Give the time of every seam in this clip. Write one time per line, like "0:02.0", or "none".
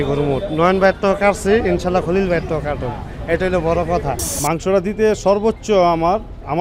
0:04.3